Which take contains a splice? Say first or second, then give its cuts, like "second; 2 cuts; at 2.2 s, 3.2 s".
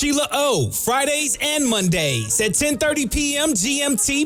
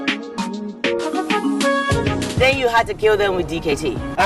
second; 1 cut; at 1.6 s